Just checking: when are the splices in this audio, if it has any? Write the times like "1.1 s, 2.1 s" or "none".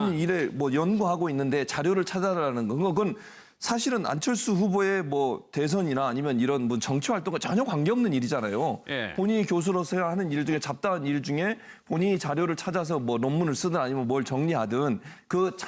5.9 s